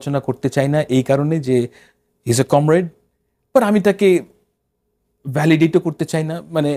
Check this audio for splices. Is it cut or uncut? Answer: uncut